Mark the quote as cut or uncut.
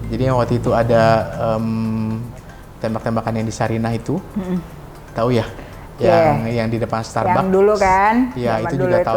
uncut